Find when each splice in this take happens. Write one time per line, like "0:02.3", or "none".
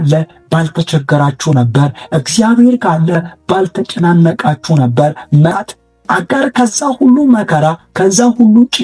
0:05.5